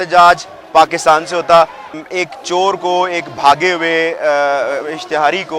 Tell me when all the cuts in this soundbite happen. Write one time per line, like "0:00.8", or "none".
0:01.8